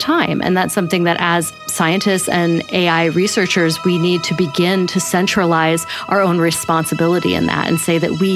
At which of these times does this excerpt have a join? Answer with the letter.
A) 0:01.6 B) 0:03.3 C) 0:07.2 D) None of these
A